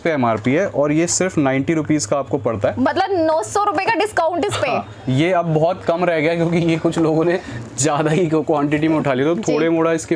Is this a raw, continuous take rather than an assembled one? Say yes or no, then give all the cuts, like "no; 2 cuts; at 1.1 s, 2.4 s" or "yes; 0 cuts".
yes; 0 cuts